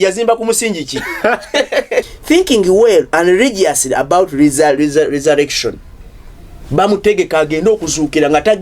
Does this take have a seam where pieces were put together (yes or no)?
yes